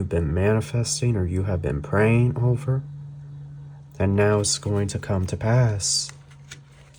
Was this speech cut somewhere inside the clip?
no; 0 cuts

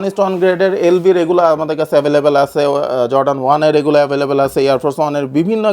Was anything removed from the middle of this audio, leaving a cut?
no; 0 cuts

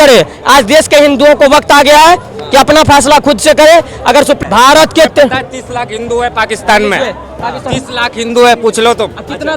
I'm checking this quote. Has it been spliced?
yes; 1 cut; at 4.4 s

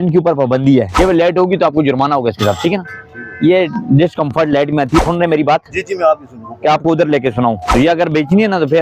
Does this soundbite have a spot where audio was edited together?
yes; 3 cuts; at 0.9 s, 5.0 s, 7.7 s

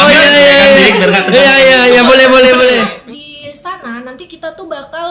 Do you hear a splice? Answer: yes; 1 cut; at 2.9 s

